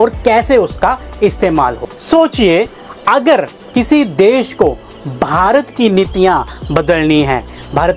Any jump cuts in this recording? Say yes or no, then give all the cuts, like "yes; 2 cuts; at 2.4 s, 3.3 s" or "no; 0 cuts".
yes; 1 cut; at 1.9 s